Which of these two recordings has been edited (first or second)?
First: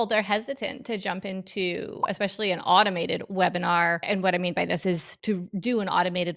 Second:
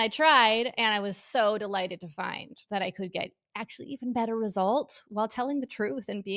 first